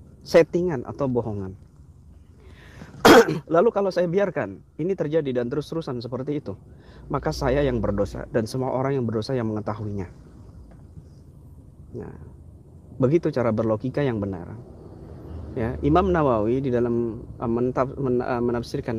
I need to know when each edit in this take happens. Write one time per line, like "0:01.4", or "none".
none